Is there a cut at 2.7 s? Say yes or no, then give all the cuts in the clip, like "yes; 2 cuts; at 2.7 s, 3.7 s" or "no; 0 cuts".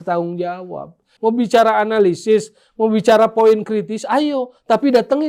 no; 1 cut; at 1.1 s